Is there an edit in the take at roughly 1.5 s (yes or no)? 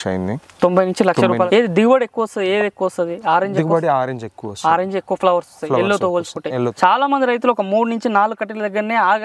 yes